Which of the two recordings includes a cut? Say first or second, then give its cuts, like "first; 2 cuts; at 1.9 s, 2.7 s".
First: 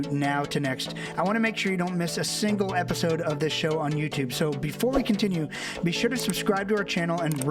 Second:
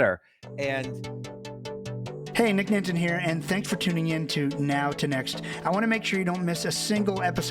second; 2 cuts; at 0.9 s, 2.3 s